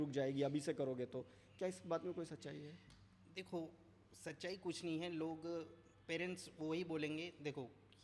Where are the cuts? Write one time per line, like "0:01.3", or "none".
none